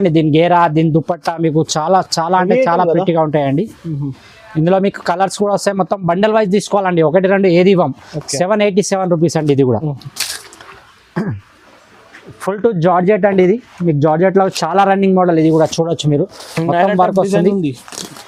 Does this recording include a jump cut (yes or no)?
no